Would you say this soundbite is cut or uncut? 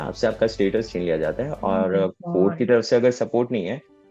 uncut